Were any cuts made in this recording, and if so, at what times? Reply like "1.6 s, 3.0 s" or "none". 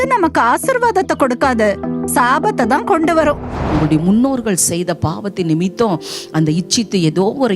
3.7 s